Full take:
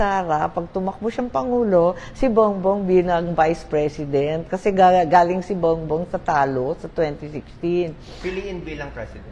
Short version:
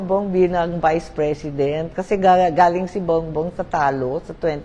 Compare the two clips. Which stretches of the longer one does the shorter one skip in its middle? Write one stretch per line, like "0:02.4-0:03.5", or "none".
none